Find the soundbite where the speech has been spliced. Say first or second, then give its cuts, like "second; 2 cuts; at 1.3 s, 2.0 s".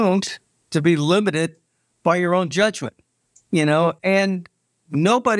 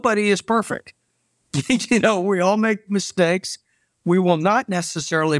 first; 1 cut; at 4.0 s